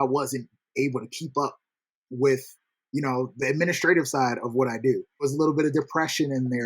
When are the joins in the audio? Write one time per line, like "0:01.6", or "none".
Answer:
0:05.3